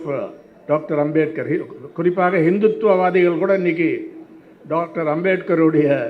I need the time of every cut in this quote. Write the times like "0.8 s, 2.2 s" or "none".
none